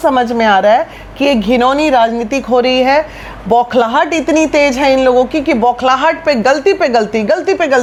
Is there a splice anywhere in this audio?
no; 0 cuts

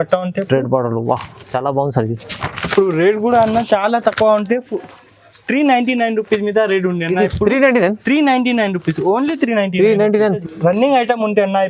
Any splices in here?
yes; 1 cut; at 10.4 s

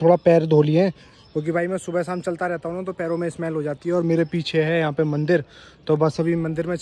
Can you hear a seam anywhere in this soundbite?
no; 0 cuts

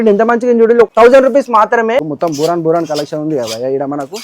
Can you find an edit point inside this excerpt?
yes; 2 cuts; at 0.9 s, 2.1 s

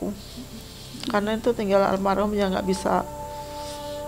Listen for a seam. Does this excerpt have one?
no; 0 cuts

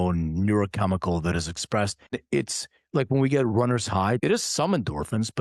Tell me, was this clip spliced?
yes; 2 cuts; at 2.2 s, 4.2 s

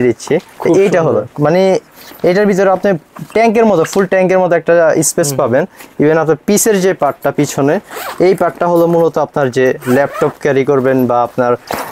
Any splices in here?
no; 0 cuts

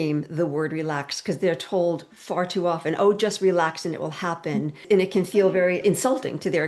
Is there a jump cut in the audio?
yes; 2 cuts; at 4.8 s, 5.8 s

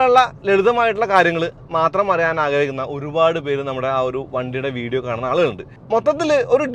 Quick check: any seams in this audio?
yes; 1 cut; at 5.7 s

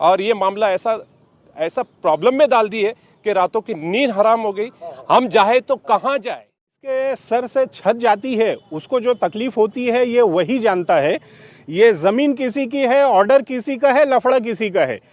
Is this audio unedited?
no; 1 cut; at 6.8 s

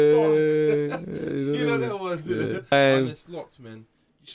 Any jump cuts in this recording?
yes; 1 cut; at 2.7 s

